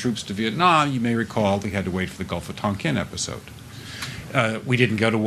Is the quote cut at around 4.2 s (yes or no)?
yes